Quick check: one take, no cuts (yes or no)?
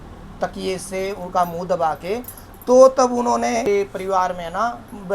no